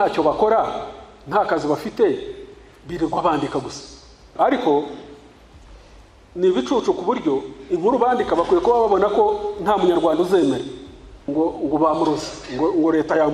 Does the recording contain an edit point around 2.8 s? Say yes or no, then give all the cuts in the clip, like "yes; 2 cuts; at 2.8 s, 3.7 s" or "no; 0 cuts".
no; 2 cuts; at 4.3 s, 11.2 s